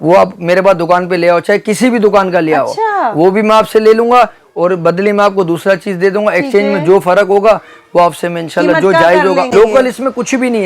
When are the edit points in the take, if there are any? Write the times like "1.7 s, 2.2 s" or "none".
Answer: 9.5 s